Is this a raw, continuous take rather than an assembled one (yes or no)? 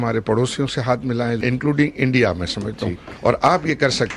no